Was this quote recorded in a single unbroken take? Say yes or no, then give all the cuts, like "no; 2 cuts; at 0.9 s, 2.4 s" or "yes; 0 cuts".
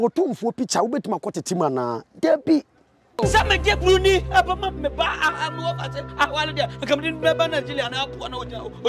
yes; 0 cuts